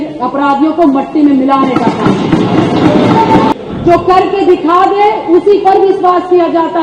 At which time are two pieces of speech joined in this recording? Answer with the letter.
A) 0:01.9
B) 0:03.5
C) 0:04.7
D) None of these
B